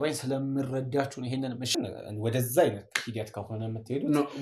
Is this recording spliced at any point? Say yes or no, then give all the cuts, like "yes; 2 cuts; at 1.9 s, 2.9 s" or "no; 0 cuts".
yes; 1 cut; at 1.8 s